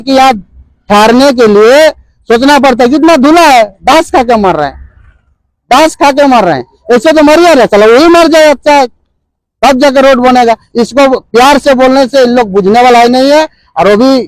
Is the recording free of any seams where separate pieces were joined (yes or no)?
yes